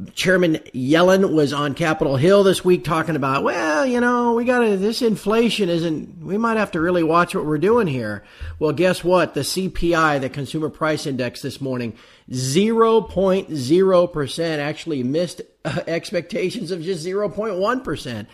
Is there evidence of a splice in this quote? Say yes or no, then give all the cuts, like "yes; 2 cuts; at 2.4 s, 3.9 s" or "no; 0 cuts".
yes; 1 cut; at 2.7 s